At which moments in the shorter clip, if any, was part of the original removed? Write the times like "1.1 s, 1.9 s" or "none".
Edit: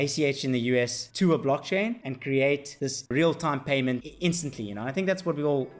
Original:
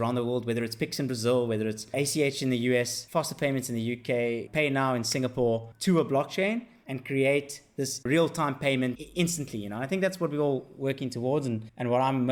1.0 s, 2.1 s, 2.8 s